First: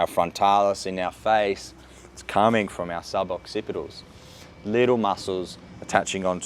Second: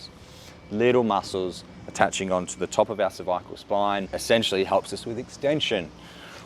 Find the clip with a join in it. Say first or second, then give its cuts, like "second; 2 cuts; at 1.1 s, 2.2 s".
second; 1 cut; at 4.1 s